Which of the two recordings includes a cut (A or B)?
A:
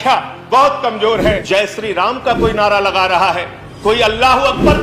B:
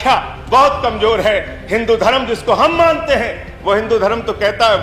A